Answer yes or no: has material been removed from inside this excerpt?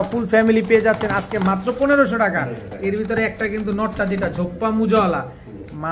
no